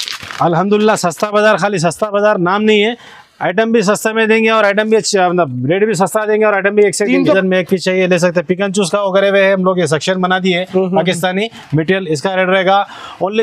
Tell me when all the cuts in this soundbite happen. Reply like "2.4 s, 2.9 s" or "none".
7.3 s